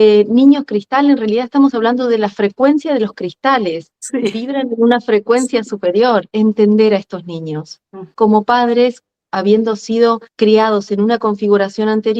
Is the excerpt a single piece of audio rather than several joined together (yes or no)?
no